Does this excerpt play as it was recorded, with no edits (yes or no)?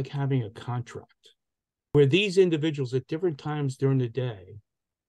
no